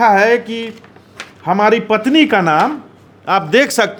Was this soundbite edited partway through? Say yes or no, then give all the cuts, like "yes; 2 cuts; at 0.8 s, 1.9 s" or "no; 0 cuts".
no; 0 cuts